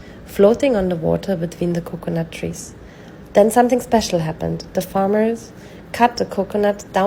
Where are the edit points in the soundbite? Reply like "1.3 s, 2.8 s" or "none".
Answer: none